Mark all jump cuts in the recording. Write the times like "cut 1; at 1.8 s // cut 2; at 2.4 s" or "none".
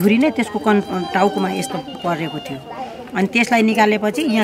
none